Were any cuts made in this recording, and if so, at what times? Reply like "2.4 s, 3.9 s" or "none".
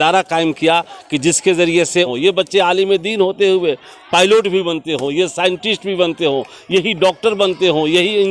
2.1 s